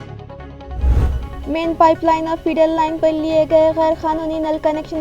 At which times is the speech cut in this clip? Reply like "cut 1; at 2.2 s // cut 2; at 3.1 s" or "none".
cut 1; at 1.0 s